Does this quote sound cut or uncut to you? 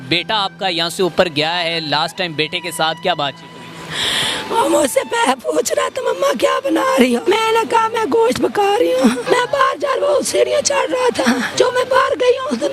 cut